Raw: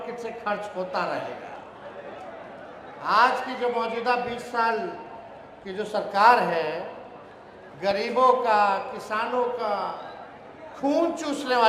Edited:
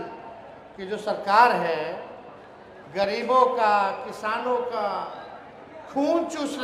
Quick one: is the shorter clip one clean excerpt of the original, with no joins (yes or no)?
yes